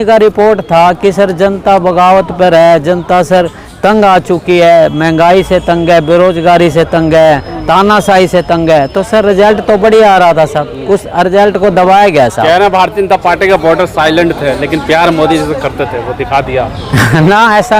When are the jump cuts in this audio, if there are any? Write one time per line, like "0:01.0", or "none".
none